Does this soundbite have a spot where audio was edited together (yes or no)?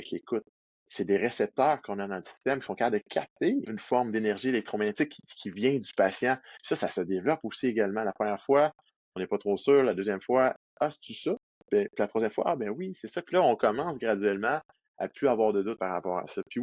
yes